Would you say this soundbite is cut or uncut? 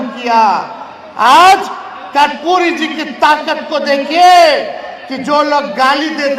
uncut